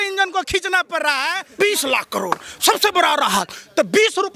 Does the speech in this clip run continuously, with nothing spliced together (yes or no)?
no